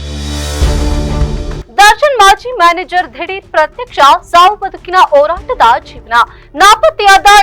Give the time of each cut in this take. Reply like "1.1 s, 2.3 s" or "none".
none